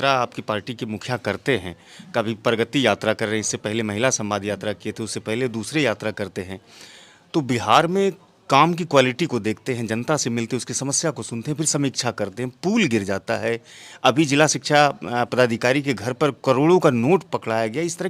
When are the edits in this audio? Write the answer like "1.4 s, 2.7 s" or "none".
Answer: none